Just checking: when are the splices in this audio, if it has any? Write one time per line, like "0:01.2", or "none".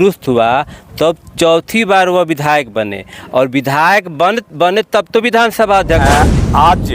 0:06.0